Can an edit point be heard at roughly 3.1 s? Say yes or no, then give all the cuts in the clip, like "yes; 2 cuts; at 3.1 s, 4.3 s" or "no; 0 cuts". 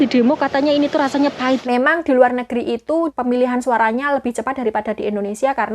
yes; 2 cuts; at 1.6 s, 3.1 s